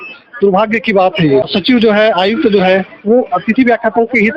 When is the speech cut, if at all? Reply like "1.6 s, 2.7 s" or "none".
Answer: 1.5 s

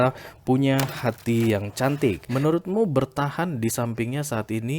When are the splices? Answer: 2.2 s

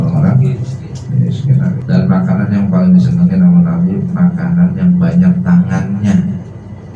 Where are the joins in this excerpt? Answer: 1.8 s

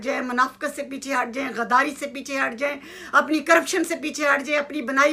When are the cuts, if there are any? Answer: none

